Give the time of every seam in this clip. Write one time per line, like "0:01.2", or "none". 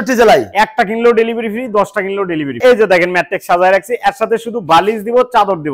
0:02.6